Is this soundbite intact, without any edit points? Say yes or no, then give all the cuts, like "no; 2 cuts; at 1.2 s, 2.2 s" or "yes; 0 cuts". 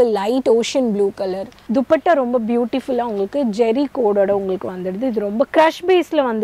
no; 2 cuts; at 1.5 s, 5.5 s